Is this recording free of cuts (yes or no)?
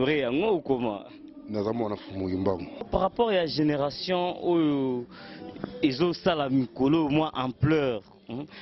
no